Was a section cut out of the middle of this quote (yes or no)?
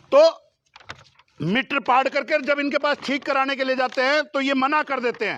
no